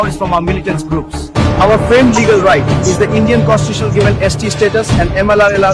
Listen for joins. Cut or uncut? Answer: uncut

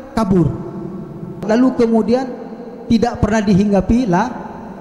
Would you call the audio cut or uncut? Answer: cut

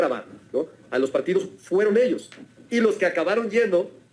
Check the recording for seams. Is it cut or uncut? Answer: uncut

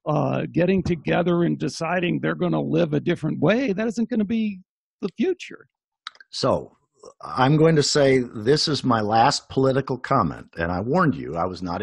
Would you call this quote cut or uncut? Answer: uncut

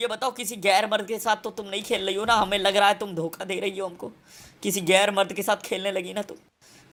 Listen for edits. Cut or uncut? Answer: uncut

